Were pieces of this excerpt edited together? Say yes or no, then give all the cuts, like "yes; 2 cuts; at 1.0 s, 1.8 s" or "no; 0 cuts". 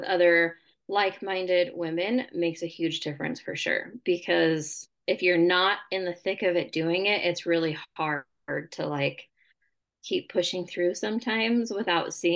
no; 0 cuts